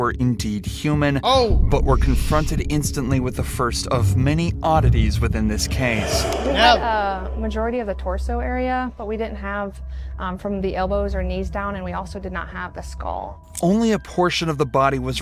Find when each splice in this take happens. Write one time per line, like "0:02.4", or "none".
none